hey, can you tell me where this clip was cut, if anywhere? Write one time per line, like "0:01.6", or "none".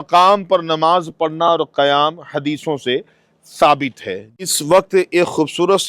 0:04.3